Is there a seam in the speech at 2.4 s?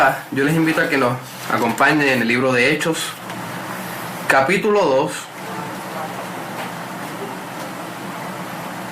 yes; 1 cut; at 2.4 s

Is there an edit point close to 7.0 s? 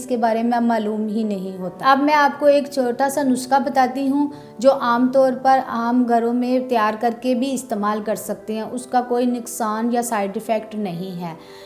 no; 1 cut; at 1.6 s

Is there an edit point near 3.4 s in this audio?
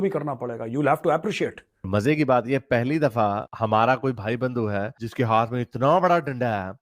no; 1 cut; at 1.9 s

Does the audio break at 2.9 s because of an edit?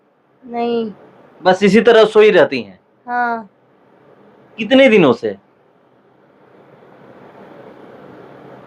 no; 0 cuts

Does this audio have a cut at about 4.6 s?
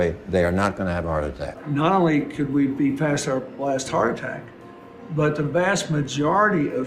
no; 1 cut; at 1.5 s

